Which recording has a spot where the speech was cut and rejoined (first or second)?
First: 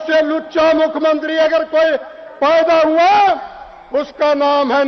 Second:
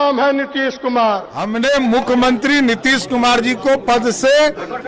second